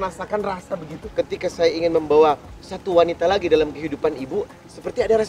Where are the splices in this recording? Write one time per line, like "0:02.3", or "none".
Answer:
0:01.0